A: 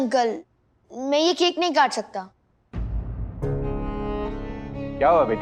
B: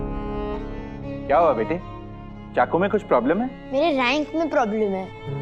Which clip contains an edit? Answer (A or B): B